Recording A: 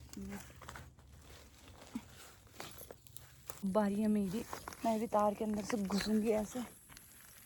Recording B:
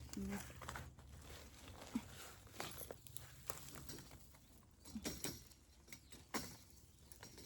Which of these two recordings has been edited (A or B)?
A